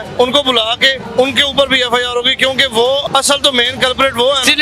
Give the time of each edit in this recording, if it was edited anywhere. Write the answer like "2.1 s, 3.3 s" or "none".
1.0 s, 3.1 s